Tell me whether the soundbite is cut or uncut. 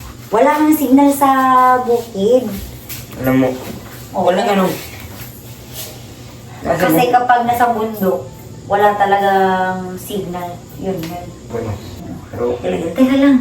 cut